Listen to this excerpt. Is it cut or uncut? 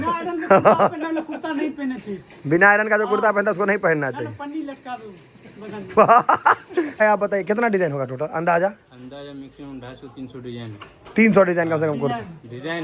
cut